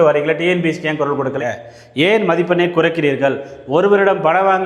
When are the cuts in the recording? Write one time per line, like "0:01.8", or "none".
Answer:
0:01.4